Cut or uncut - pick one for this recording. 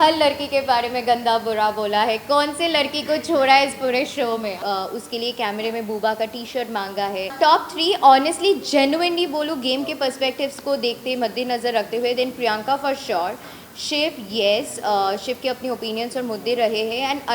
cut